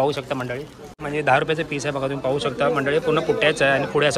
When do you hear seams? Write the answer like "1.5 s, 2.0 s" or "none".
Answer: 1.0 s